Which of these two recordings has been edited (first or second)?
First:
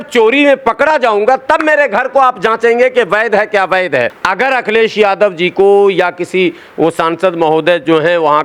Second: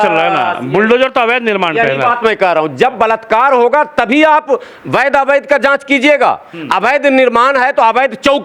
first